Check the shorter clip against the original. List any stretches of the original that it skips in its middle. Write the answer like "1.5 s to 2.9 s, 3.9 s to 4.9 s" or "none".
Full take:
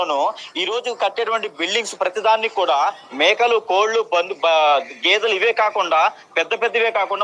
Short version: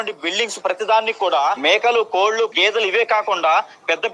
2.9 s to 3.1 s, 4.1 s to 5.0 s